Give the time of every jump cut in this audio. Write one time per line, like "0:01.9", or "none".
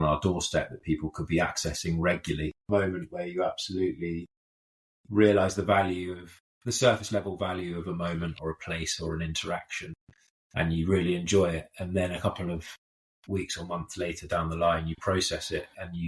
0:02.7